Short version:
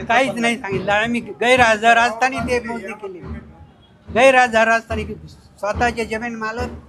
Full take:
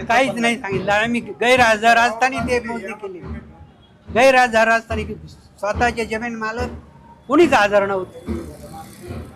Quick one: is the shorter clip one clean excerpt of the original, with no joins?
yes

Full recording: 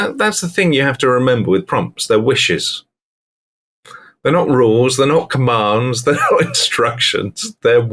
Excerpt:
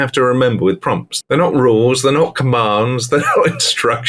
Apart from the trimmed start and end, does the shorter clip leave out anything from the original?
yes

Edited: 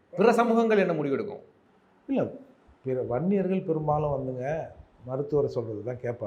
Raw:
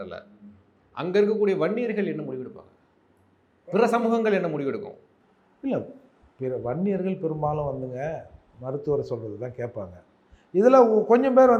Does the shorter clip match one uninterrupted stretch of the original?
yes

